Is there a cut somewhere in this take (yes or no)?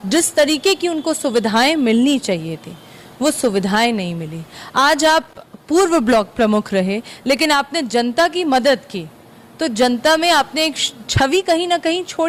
no